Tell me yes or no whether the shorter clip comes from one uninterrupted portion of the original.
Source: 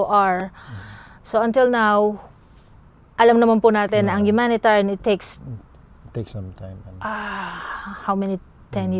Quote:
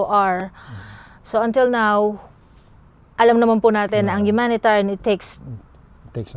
yes